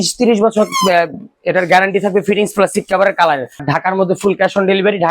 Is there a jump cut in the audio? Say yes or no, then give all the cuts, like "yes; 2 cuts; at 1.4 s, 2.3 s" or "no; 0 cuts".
yes; 1 cut; at 3.7 s